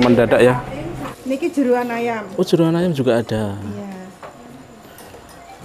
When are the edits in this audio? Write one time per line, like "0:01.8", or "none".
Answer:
0:01.1